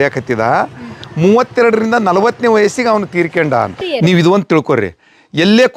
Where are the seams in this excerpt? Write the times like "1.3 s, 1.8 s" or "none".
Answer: 3.8 s